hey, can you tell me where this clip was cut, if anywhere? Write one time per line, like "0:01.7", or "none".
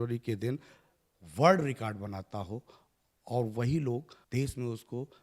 0:04.2